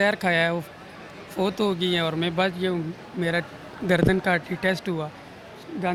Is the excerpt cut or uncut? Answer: uncut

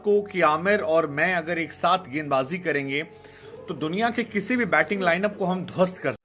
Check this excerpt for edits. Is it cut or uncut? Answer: uncut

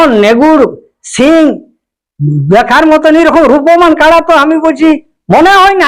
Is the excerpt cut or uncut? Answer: uncut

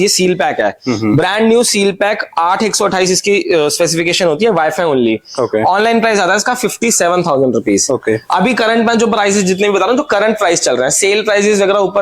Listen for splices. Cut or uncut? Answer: uncut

